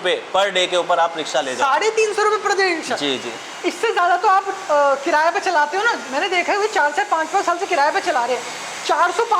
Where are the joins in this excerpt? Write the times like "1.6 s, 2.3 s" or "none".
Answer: none